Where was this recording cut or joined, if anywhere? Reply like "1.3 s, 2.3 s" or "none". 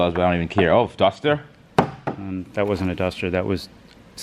none